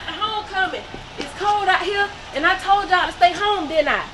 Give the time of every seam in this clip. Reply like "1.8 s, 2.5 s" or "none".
none